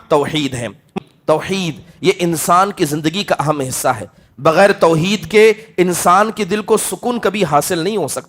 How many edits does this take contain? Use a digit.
1